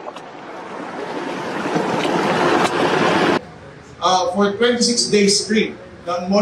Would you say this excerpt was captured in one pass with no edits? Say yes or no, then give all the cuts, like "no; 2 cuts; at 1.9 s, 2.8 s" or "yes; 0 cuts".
no; 1 cut; at 3.4 s